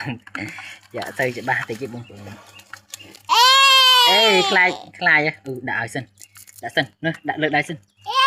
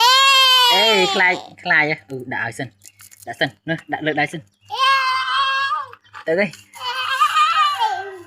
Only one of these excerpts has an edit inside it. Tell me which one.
second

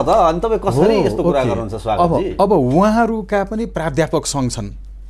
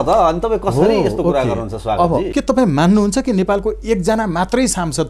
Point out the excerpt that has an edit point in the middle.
second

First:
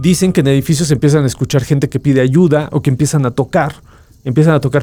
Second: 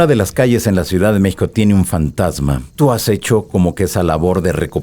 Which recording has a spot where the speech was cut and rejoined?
second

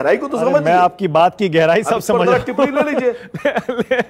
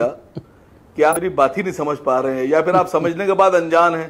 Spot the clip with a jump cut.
second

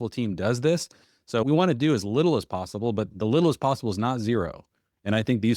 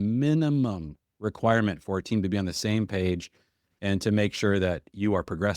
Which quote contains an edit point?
first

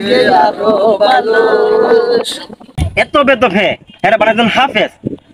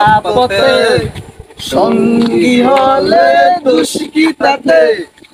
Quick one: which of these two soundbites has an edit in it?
first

